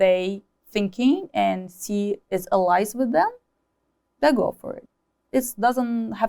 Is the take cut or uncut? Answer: cut